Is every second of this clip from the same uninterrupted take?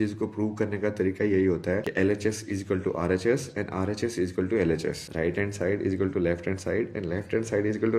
no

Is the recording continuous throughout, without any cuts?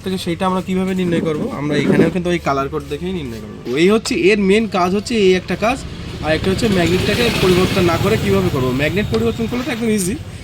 no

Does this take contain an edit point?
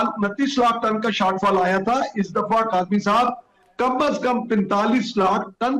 no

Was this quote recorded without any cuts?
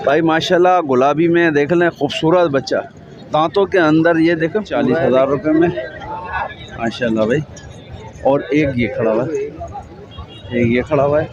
no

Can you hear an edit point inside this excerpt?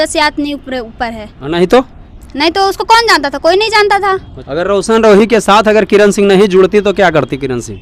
yes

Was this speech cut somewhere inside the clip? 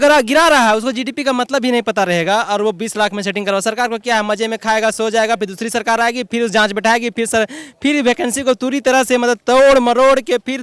no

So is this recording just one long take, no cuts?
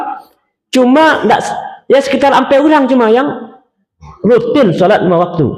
yes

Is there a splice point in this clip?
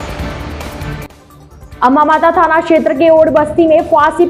no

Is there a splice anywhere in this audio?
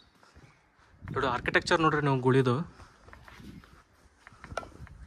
no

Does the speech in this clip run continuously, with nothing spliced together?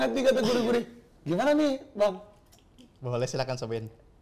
yes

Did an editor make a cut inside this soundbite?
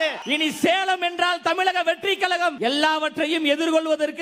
yes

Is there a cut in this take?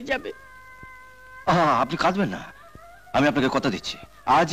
no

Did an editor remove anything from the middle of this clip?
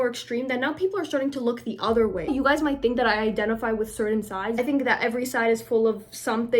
yes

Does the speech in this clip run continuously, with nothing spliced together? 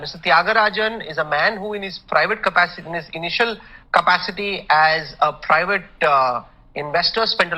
no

